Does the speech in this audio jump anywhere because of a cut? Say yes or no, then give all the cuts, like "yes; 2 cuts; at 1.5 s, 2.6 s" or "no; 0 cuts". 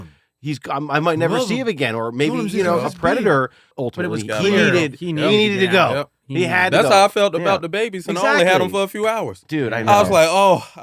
yes; 1 cut; at 3.6 s